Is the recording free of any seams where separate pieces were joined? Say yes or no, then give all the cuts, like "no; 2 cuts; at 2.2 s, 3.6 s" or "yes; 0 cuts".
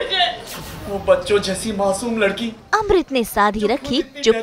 yes; 0 cuts